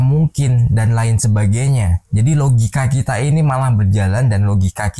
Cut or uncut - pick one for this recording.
uncut